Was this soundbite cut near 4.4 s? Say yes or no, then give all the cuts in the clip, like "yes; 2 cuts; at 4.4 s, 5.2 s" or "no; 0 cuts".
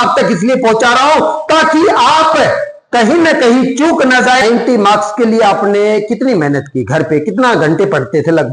yes; 1 cut; at 4.4 s